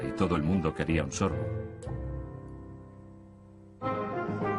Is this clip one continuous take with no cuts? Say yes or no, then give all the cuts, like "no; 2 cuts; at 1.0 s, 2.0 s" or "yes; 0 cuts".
no; 1 cut; at 3.2 s